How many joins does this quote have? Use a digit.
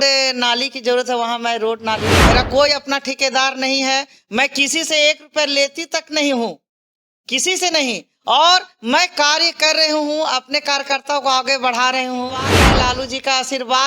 2